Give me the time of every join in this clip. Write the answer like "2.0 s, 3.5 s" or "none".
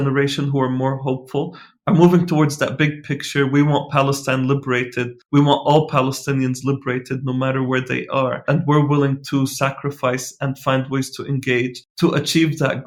none